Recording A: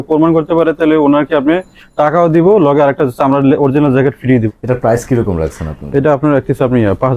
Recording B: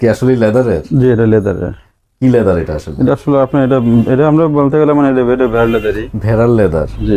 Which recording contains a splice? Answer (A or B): A